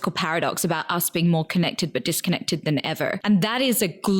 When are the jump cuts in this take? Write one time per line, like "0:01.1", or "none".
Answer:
0:03.2

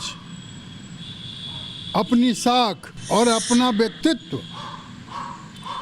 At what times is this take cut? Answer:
0:02.9

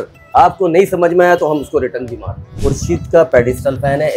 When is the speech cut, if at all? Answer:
0:02.6

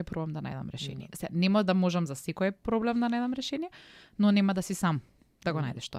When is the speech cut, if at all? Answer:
none

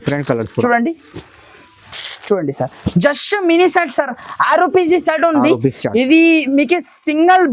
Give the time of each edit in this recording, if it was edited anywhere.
none

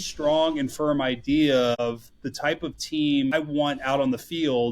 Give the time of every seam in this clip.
0:01.8
0:03.3

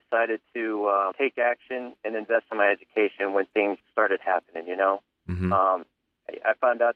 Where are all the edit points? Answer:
0:01.1
0:03.8

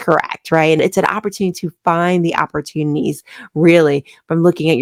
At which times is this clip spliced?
none

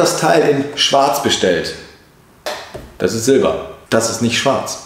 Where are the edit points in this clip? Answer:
none

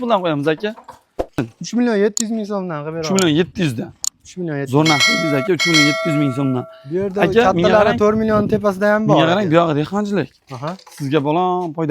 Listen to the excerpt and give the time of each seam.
0:01.4

